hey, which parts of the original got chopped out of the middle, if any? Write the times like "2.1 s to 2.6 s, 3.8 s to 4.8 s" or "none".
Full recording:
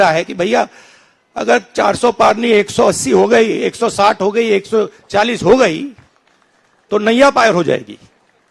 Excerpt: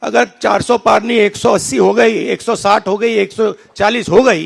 none